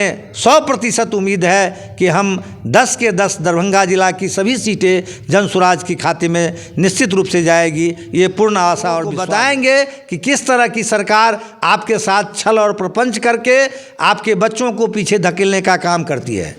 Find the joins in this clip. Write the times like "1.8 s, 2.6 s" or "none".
9.2 s